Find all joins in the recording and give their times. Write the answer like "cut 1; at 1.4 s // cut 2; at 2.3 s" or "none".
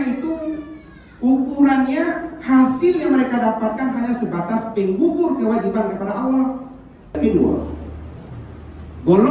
cut 1; at 7.1 s